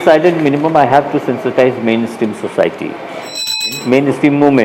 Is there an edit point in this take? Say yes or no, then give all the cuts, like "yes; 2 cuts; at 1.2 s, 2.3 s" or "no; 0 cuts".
yes; 1 cut; at 3.7 s